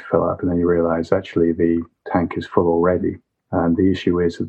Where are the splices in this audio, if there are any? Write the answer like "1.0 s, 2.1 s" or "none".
none